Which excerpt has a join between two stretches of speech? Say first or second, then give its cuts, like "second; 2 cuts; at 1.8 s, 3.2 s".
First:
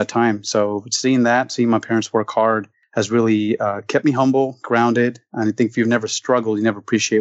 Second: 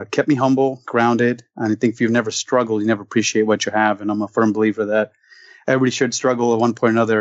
first; 1 cut; at 2.8 s